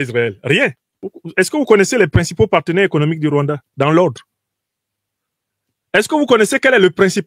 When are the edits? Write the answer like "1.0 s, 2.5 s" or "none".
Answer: 1.2 s

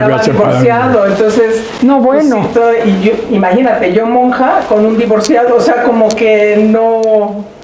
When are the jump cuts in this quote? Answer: none

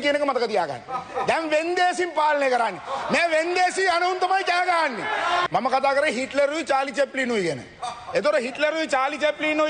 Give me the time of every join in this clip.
5.4 s

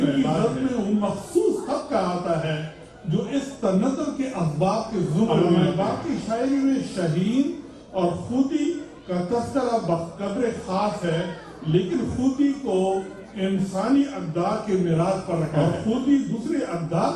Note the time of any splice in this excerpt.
15.6 s

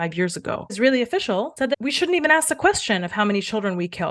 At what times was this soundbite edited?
0.8 s, 1.7 s

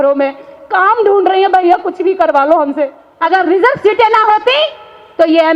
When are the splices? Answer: 3.0 s

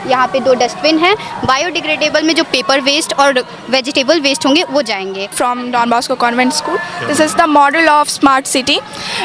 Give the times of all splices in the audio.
5.3 s

